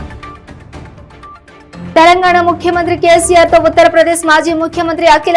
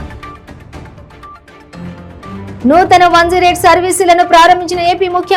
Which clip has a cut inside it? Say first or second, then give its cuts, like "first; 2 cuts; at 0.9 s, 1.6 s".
first; 1 cut; at 2.0 s